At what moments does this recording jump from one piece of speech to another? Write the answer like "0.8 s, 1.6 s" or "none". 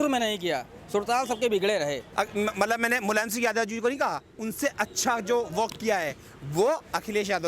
2.0 s